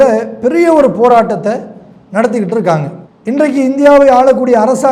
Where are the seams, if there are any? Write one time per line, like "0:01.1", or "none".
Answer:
none